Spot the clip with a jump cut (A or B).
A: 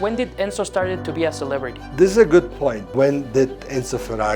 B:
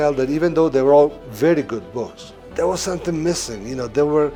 A